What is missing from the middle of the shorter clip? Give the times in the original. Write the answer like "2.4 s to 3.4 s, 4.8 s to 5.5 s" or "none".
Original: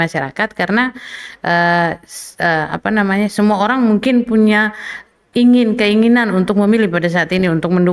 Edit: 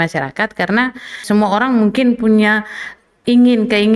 1.2 s to 3.3 s